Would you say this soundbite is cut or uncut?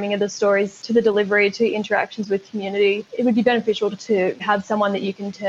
cut